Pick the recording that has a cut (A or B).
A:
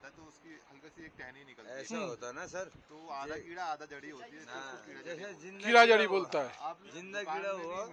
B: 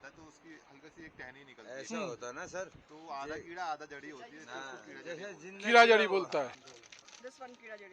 B